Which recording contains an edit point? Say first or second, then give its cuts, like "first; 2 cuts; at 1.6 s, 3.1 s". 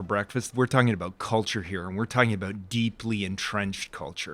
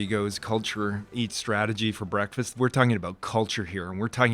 second; 1 cut; at 1.1 s